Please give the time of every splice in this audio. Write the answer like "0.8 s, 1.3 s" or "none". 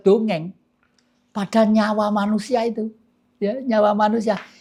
none